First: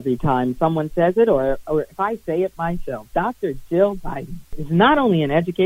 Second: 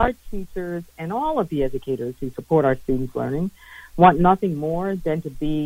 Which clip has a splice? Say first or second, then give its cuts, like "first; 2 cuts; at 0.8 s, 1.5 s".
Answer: first; 1 cut; at 4.6 s